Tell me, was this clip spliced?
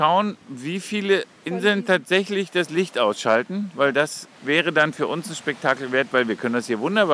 yes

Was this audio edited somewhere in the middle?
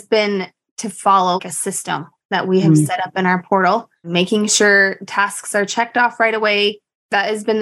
yes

